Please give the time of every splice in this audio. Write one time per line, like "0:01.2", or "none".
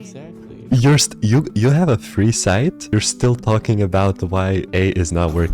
0:02.8
0:04.7